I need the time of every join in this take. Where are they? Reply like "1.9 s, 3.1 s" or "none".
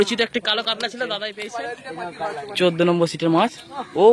1.4 s